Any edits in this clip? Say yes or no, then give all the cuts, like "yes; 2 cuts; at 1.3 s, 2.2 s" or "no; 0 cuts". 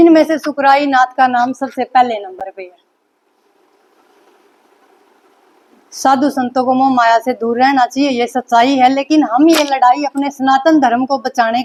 no; 0 cuts